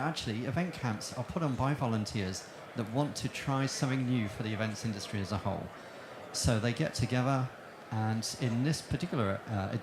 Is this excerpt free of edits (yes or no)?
no